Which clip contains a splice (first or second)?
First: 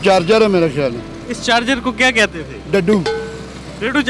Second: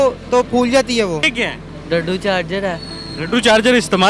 second